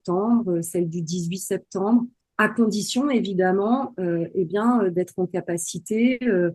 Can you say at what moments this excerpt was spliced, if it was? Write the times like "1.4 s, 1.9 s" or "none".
2.2 s